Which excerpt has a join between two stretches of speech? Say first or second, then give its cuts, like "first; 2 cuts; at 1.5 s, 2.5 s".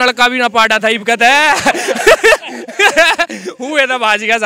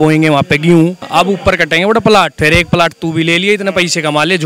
second; 2 cuts; at 1.0 s, 2.3 s